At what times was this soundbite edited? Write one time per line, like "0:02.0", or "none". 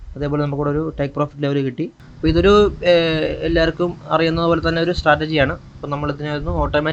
0:02.0